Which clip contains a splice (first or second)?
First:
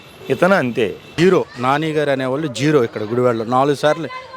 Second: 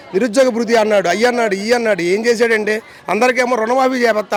first